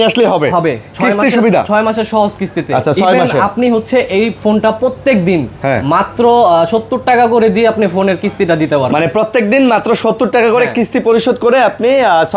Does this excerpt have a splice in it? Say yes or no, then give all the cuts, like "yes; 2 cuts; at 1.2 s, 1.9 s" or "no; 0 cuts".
no; 0 cuts